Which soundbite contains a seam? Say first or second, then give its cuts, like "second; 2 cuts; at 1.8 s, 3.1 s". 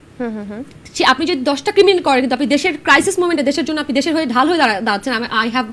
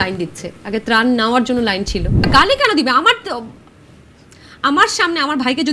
second; 1 cut; at 2.2 s